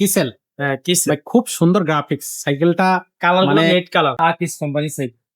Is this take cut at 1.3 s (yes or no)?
no